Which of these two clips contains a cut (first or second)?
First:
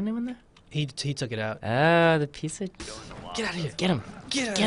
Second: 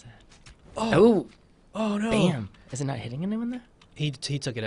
first